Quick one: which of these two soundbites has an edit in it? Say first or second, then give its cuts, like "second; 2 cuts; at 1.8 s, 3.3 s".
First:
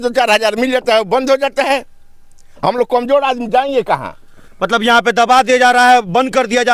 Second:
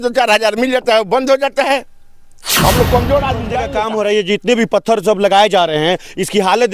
second; 1 cut; at 3.6 s